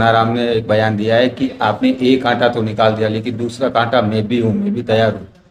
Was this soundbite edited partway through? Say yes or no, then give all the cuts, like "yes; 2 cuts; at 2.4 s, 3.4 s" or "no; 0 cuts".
no; 0 cuts